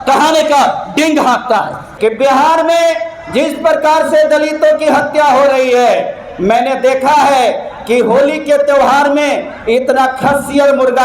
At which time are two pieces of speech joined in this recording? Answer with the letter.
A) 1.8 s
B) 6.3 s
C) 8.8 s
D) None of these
A